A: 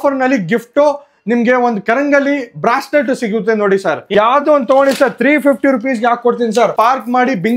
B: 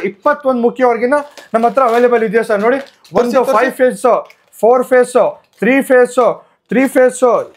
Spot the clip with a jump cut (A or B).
A